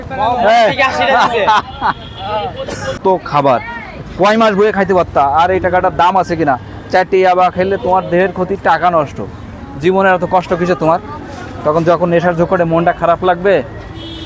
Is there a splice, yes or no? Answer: yes